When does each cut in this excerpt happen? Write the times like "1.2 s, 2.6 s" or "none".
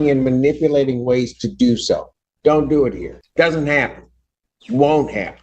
3.1 s